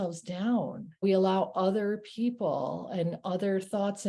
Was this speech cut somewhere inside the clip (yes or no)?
yes